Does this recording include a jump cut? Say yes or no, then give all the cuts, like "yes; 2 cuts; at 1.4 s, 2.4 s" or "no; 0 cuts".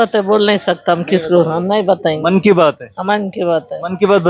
no; 0 cuts